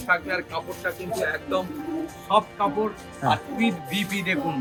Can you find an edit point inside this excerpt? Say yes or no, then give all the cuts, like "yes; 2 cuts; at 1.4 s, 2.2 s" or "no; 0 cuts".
no; 0 cuts